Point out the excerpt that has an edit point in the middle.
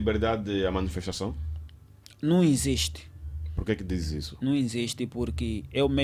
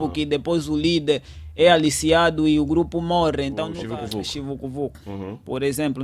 second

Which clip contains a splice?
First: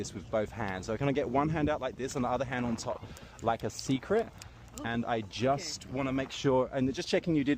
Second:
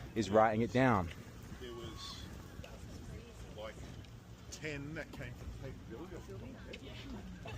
second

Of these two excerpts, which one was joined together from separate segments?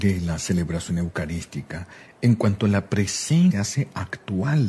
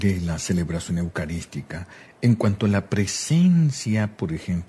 second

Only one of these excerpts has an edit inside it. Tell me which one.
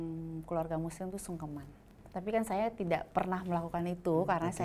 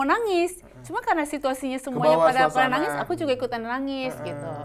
first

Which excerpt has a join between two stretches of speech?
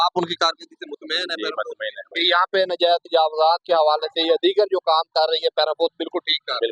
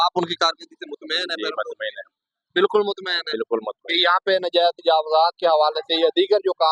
first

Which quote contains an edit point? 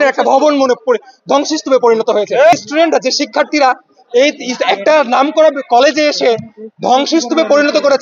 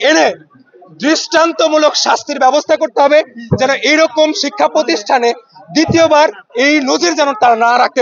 first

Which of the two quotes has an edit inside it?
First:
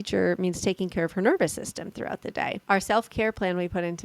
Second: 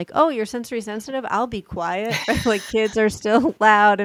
first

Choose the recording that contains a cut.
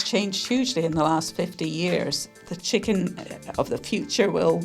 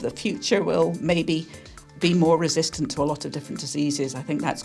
first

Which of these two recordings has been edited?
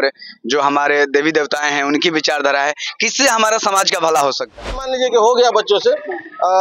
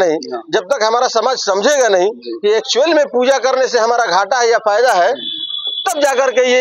first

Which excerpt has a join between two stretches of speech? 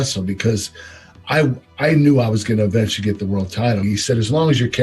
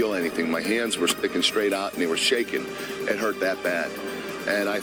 first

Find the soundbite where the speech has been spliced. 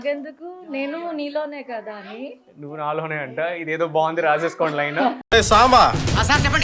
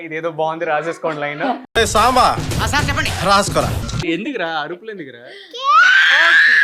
second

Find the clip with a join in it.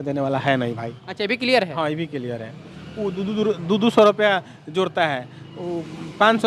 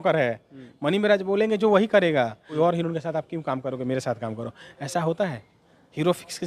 second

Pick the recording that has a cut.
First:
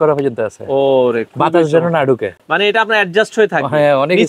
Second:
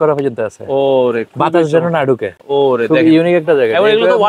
second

